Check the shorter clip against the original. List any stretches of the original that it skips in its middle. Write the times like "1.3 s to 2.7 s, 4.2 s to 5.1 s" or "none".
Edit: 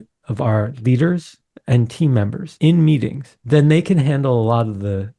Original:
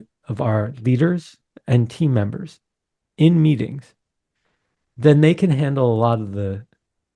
2.4 s to 3.0 s, 3.9 s to 4.8 s